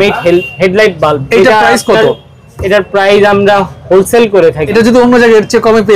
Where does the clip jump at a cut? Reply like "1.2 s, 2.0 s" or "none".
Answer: 4.7 s